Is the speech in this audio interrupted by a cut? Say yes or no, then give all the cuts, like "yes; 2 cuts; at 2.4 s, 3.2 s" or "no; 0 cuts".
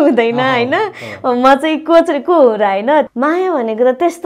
yes; 1 cut; at 3.1 s